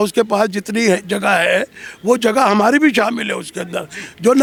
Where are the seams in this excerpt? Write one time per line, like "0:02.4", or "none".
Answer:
none